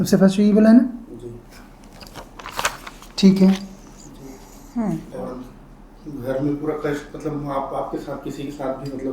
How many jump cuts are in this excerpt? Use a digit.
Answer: 1